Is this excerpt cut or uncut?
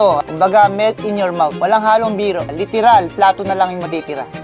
cut